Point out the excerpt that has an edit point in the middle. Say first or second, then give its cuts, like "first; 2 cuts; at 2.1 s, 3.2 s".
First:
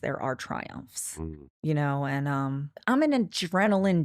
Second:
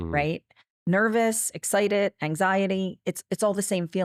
first; 1 cut; at 2.8 s